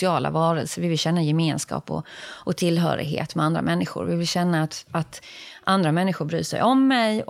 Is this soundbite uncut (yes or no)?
yes